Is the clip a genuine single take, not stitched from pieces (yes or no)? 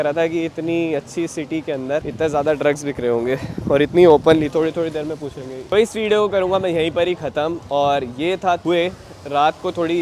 yes